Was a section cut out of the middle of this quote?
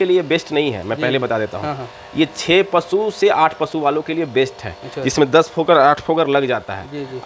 no; 0 cuts

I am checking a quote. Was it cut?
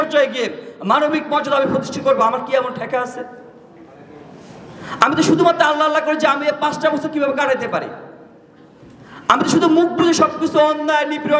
no; 0 cuts

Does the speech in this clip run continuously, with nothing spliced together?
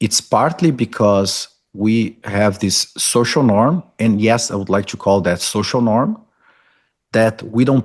yes; 0 cuts

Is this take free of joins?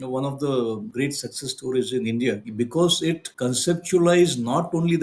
no; 3 cuts; at 0.9 s, 2.5 s, 3.3 s

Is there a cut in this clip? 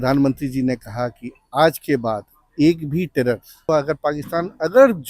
yes; 1 cut; at 3.7 s

